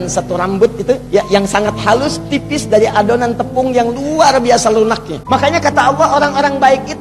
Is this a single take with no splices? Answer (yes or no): no